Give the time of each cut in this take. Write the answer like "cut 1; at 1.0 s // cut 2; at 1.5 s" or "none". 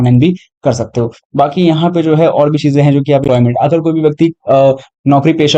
cut 1; at 3.3 s